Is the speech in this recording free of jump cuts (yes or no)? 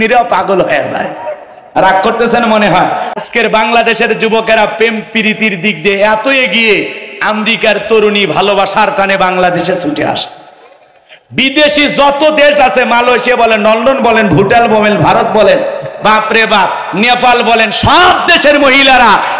no